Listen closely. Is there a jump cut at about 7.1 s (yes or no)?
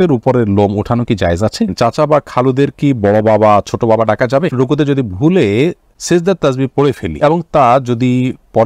yes